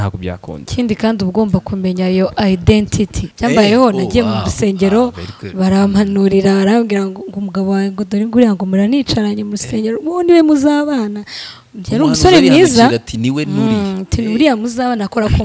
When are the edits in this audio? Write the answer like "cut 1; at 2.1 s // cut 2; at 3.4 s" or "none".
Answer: cut 1; at 3.3 s